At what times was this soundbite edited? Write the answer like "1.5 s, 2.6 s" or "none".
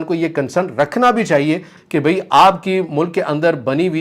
1.8 s